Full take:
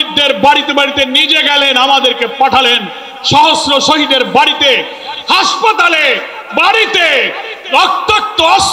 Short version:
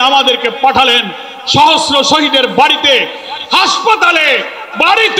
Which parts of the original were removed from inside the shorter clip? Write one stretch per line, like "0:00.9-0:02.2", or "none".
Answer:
none